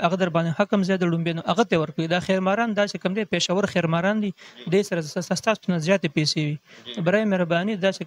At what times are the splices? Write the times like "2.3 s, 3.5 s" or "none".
none